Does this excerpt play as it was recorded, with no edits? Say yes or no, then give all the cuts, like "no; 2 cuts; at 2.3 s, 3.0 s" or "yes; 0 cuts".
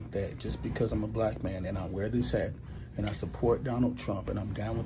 yes; 0 cuts